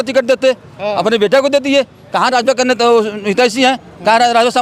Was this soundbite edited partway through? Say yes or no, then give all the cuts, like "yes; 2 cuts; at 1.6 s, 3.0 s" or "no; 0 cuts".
no; 0 cuts